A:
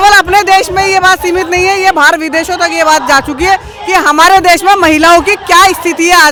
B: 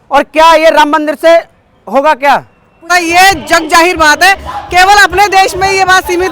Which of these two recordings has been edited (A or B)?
B